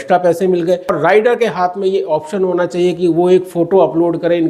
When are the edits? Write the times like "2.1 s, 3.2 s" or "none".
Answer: 1.0 s